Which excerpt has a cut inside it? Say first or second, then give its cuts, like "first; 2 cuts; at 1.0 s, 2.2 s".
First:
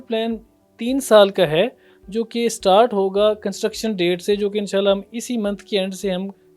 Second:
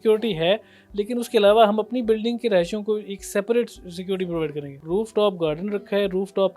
second; 1 cut; at 4.7 s